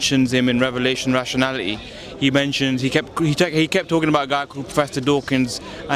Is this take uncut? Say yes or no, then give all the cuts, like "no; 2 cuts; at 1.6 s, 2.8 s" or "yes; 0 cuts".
yes; 0 cuts